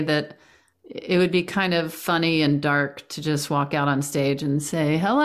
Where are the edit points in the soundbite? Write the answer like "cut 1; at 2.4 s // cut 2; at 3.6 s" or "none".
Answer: none